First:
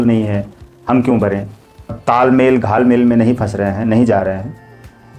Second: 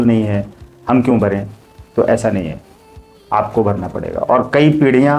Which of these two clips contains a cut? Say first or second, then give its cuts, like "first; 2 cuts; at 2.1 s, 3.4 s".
first; 1 cut; at 1.9 s